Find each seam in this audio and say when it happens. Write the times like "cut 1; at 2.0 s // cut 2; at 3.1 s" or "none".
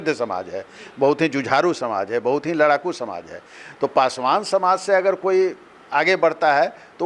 none